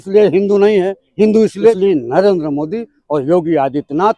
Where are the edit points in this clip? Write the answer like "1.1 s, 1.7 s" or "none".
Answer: 1.8 s

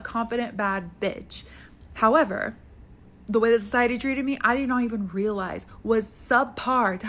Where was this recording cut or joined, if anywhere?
4.4 s

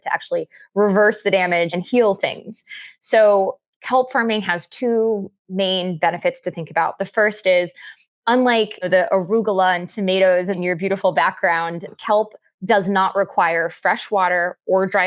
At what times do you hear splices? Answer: 1.7 s, 8.8 s, 10.6 s, 11.9 s

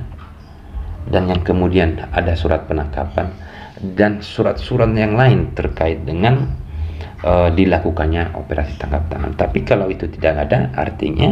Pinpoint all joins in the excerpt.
none

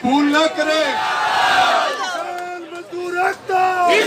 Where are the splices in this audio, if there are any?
1.1 s

